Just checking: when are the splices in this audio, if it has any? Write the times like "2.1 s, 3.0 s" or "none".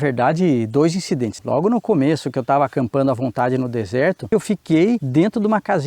1.3 s, 4.3 s